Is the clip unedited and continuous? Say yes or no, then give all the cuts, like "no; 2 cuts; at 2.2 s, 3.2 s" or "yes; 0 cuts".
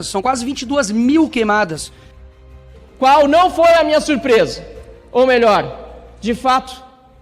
no; 1 cut; at 2.4 s